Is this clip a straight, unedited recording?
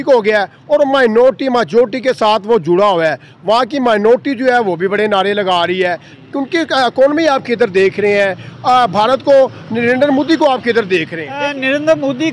no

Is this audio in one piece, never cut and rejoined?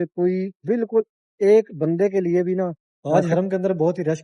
no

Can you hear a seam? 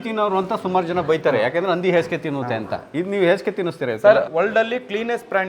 yes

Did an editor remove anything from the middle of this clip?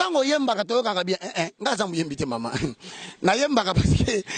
no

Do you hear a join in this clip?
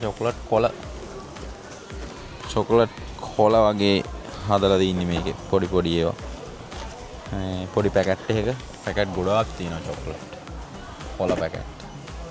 no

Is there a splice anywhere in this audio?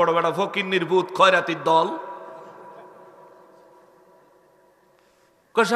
no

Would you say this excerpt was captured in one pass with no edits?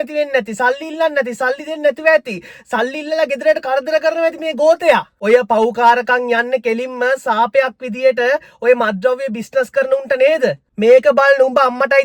no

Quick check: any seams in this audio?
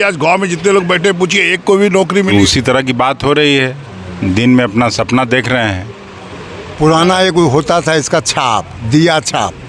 yes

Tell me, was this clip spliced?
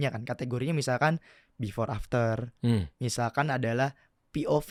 no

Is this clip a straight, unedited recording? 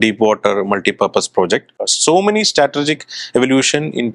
no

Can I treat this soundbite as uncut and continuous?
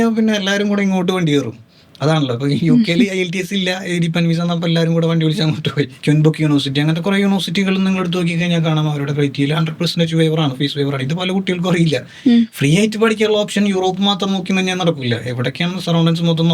no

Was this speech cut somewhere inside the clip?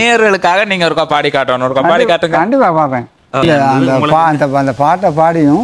yes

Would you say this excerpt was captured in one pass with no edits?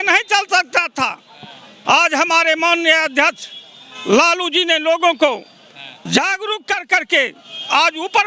yes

